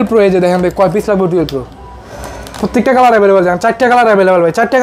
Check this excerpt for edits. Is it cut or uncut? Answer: uncut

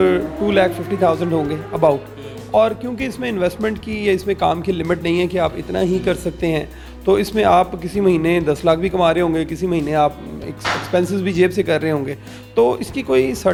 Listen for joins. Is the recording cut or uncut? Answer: uncut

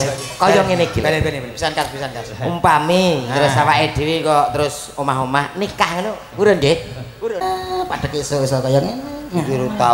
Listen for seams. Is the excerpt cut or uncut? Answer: cut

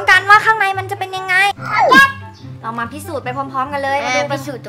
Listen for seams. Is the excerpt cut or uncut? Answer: cut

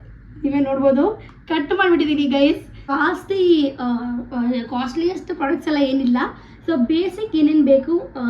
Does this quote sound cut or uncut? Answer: cut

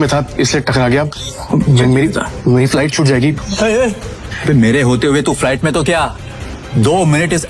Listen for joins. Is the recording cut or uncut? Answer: cut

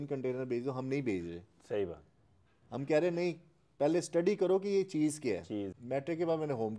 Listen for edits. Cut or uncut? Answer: cut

